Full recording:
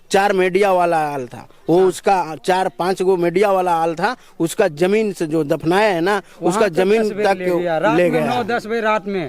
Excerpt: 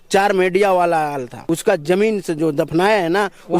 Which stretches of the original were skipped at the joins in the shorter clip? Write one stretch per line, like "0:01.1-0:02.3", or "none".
0:01.3-0:04.3